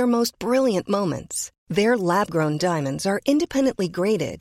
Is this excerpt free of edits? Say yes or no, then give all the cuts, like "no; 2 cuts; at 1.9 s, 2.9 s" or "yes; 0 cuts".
yes; 0 cuts